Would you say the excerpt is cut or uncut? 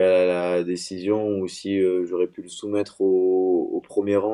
uncut